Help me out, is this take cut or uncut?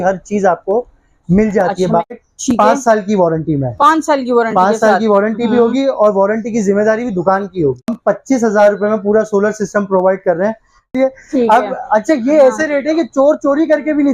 cut